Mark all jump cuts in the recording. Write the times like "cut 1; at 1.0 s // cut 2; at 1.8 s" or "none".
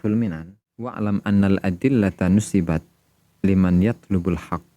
cut 1; at 0.9 s